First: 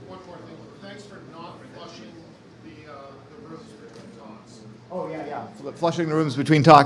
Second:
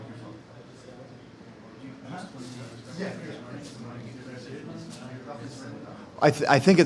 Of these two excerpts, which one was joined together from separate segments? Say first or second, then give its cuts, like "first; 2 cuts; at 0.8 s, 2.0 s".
first; 1 cut; at 5.8 s